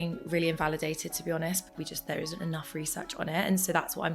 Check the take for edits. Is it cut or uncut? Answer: cut